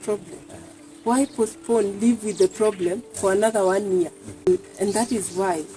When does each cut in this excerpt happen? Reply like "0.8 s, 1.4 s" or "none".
4.5 s